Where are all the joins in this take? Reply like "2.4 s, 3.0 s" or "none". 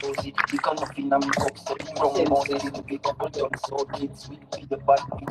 2.3 s